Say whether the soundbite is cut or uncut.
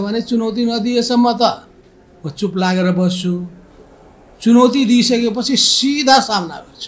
uncut